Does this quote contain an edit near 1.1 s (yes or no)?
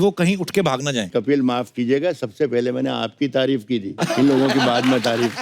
yes